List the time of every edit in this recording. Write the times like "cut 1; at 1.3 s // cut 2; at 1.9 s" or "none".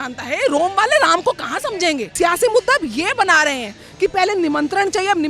cut 1; at 2.1 s